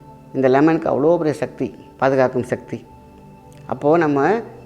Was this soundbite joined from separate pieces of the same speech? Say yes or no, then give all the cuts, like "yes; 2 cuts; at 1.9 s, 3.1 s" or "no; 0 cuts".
no; 0 cuts